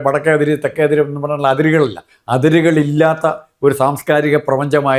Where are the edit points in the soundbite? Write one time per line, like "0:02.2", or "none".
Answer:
none